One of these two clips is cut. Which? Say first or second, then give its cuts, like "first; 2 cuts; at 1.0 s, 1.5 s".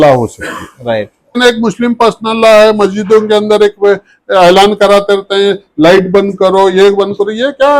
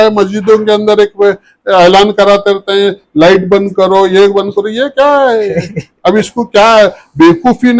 first; 1 cut; at 1.4 s